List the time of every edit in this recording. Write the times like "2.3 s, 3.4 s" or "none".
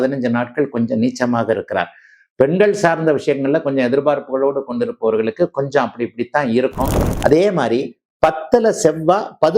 7.0 s